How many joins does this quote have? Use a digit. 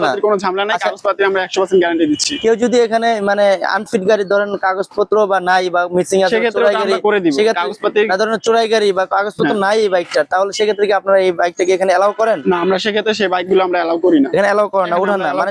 0